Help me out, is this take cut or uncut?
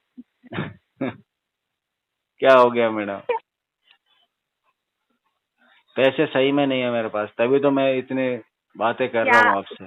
uncut